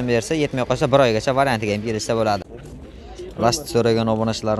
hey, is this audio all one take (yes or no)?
no